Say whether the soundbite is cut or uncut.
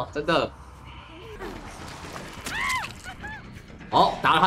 cut